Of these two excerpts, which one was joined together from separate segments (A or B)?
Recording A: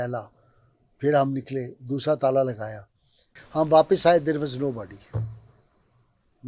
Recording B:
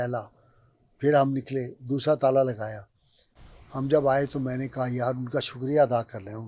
A